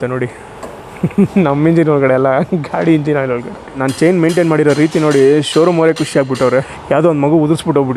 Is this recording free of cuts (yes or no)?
no